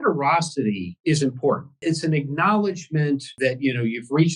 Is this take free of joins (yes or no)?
no